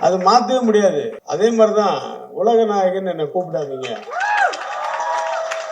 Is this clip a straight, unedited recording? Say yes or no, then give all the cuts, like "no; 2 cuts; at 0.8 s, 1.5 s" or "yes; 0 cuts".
no; 1 cut; at 1.2 s